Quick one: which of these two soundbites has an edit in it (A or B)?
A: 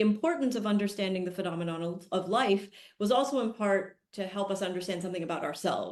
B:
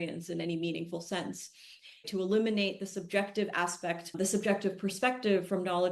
B